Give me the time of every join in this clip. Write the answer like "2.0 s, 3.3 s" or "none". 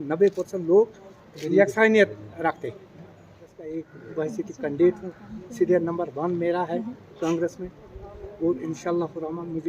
3.6 s